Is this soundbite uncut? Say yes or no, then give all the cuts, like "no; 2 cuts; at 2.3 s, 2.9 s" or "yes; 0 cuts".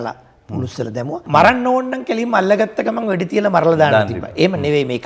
no; 1 cut; at 1.2 s